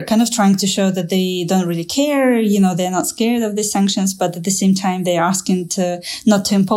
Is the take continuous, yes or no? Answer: yes